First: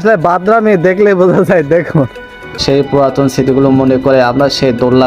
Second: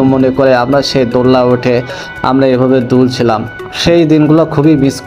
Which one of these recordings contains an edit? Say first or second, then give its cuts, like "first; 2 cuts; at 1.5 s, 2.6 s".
first; 1 cut; at 2.5 s